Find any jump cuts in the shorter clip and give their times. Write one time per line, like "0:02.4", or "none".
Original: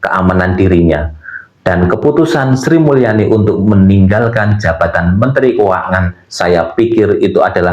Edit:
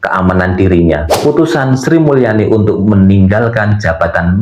0:01.2